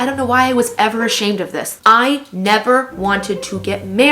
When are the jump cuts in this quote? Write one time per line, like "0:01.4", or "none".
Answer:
0:01.7